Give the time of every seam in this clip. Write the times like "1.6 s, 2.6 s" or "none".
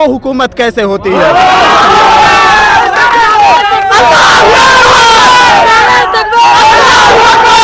none

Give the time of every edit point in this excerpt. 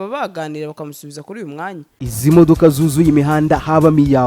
1.9 s

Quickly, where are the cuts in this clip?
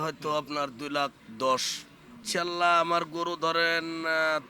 1.2 s, 2.2 s

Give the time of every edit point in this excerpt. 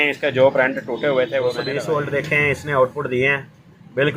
1.6 s

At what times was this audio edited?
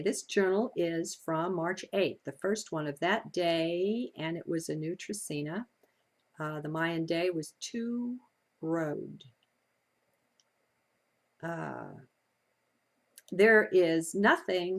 3.7 s

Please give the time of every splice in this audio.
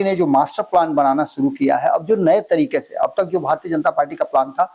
none

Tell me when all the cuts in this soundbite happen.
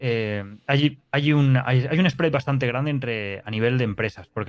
none

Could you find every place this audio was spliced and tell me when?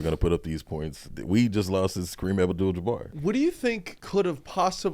1.1 s, 3.1 s, 3.9 s

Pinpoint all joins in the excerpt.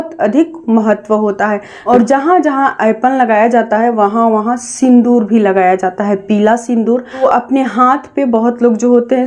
1.7 s, 7.2 s

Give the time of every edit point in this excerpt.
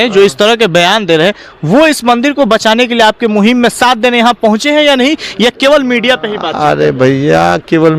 none

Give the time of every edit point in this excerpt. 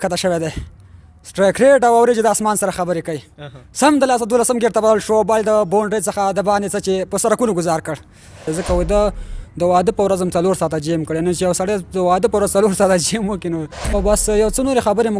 8.4 s, 13.9 s

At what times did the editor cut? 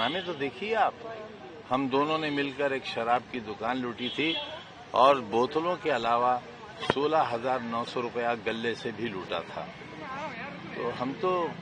none

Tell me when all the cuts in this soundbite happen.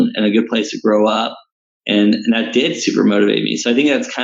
none

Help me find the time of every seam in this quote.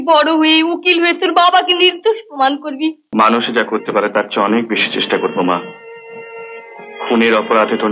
3.0 s

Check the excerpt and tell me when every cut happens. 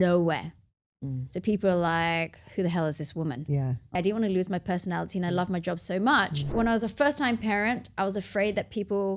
3.9 s, 6.5 s

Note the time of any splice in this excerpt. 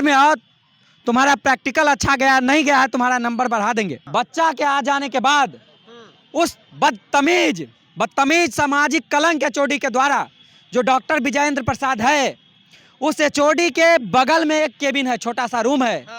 4.0 s

